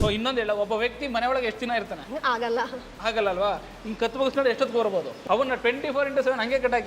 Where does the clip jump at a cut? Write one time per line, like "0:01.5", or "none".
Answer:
0:02.0
0:05.1